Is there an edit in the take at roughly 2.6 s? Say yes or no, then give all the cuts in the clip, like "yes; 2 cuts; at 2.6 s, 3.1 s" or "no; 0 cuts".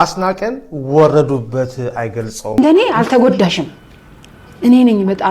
yes; 1 cut; at 2.6 s